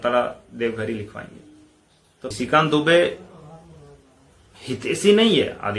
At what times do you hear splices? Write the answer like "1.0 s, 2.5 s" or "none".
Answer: 2.3 s